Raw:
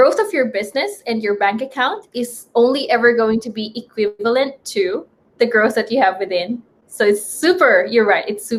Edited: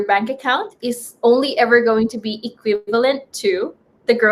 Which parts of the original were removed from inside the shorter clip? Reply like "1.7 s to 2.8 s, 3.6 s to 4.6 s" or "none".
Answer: none

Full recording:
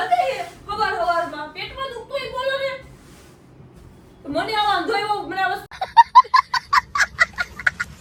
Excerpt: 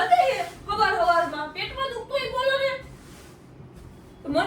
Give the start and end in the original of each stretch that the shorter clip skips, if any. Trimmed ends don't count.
none

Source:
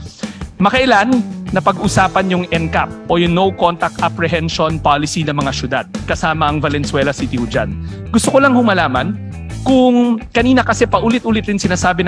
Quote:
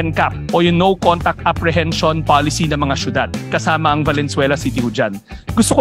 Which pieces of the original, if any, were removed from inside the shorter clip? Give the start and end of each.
none

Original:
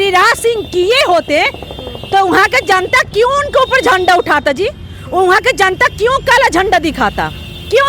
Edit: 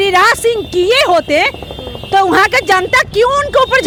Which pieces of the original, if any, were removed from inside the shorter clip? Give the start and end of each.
none

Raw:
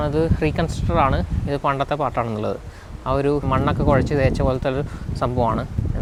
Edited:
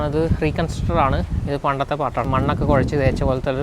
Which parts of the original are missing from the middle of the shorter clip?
2.3 s to 3.4 s

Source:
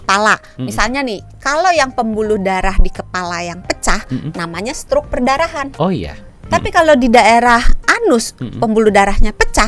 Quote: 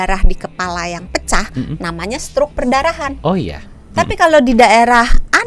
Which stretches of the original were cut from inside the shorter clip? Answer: none

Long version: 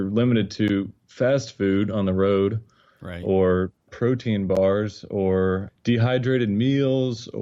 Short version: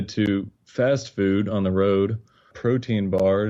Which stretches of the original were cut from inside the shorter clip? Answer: 2.9 s to 3.8 s

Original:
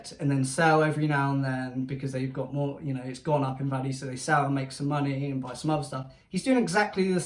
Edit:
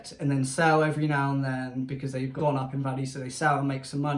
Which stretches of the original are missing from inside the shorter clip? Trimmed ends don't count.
2.3 s to 3.2 s

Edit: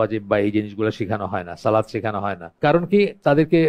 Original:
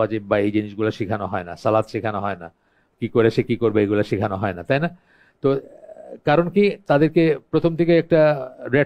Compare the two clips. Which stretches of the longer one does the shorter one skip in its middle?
2.5 s to 6.1 s

